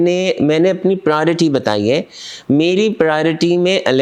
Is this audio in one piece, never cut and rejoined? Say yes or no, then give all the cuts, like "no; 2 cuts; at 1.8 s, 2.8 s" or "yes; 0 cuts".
yes; 0 cuts